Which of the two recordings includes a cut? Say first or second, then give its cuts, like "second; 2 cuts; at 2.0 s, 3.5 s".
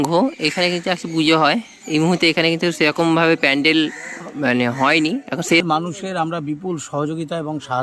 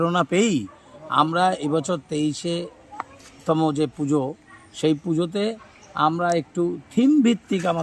first; 1 cut; at 5.6 s